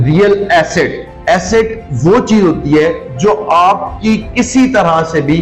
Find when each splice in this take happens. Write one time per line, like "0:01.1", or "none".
0:01.1